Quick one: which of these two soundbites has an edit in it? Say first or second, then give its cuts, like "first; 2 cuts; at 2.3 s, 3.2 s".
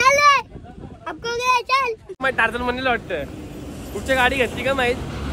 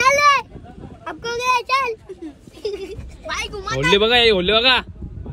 first; 1 cut; at 2.2 s